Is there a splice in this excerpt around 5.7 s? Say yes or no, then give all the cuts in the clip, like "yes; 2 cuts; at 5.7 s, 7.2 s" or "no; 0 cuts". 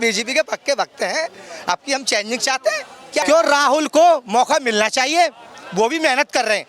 no; 1 cut; at 3.2 s